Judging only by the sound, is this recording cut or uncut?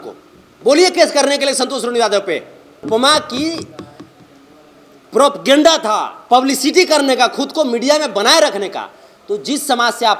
cut